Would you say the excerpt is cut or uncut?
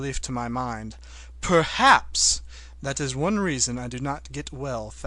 cut